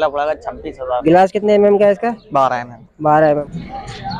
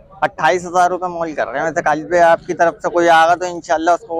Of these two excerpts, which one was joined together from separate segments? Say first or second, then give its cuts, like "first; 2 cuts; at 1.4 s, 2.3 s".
first; 2 cuts; at 1.0 s, 3.5 s